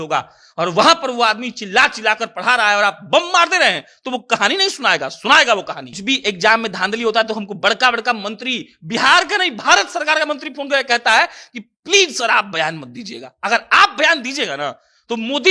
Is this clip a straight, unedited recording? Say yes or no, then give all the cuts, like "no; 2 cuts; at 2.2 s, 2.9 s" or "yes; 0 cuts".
no; 1 cut; at 5.9 s